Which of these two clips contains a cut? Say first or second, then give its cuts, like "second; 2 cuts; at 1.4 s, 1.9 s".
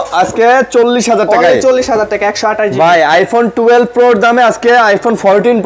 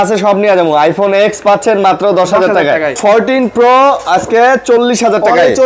second; 1 cut; at 3.0 s